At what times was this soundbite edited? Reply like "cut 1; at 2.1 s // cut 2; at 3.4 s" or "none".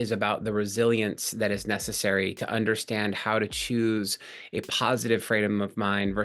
none